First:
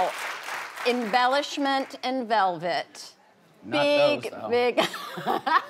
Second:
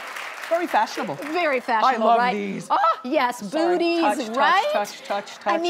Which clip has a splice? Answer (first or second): second